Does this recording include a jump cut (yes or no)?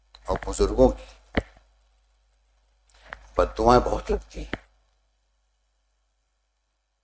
no